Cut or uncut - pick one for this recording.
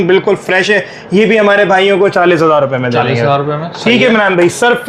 uncut